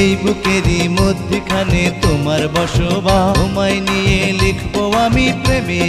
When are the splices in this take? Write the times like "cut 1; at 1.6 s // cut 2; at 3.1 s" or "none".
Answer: none